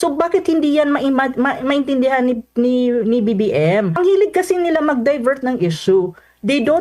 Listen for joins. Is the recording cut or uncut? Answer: cut